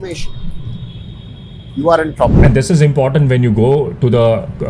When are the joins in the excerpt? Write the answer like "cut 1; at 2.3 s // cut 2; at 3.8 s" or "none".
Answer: cut 1; at 2.4 s